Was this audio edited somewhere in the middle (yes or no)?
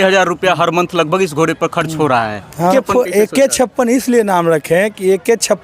yes